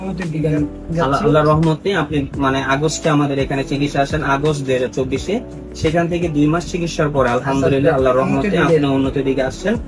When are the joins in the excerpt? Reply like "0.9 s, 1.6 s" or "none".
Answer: none